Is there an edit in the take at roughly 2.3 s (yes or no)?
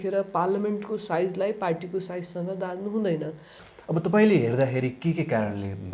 no